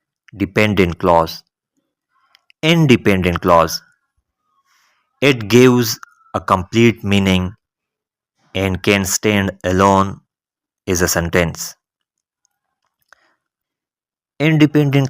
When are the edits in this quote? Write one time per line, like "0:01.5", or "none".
0:11.1